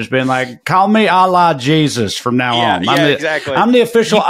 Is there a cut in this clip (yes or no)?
no